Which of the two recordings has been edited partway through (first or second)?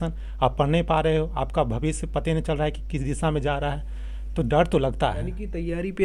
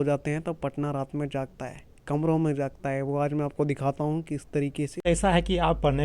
second